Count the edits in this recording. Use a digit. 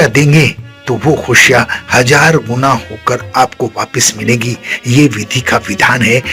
0